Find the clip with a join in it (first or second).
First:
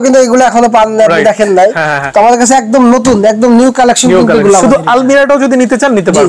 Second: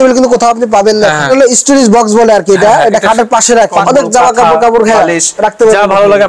second